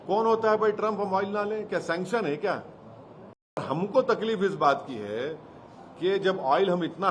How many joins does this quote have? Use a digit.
1